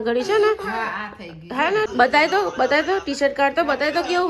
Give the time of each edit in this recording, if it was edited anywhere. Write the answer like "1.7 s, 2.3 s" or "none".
1.9 s